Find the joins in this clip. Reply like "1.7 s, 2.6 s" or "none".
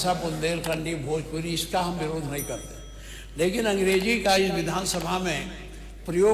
none